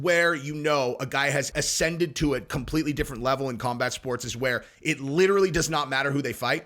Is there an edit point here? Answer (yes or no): yes